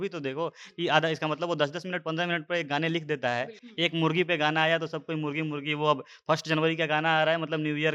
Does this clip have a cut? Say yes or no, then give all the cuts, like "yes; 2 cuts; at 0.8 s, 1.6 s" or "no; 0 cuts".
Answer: yes; 1 cut; at 3.6 s